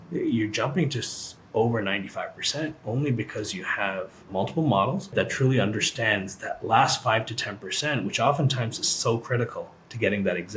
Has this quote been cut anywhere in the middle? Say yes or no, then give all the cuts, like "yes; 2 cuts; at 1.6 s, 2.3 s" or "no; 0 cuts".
yes; 2 cuts; at 4.3 s, 5.1 s